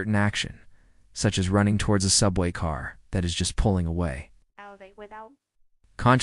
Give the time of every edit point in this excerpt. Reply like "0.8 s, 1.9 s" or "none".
2.7 s